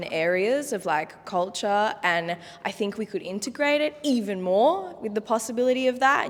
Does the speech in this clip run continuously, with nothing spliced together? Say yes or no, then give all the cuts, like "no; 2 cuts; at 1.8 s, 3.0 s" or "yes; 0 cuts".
yes; 0 cuts